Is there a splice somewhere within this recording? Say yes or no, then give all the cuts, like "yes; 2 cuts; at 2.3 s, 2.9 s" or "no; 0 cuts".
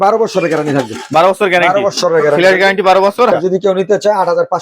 yes; 1 cut; at 3.3 s